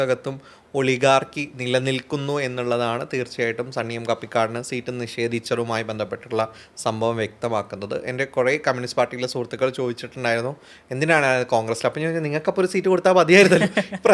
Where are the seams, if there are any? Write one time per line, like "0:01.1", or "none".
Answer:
none